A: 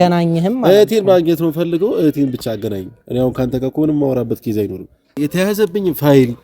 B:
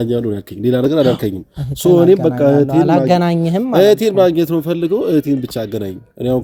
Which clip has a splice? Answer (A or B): A